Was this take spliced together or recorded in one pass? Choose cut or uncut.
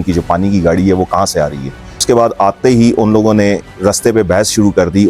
cut